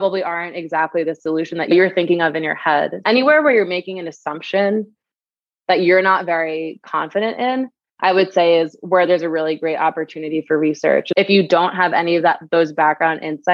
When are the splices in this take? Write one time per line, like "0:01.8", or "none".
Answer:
0:01.7
0:03.0
0:11.1